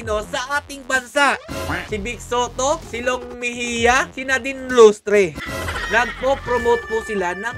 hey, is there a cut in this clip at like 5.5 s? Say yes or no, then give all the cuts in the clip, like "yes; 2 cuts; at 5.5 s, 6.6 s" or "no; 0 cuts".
yes; 2 cuts; at 1.8 s, 5.5 s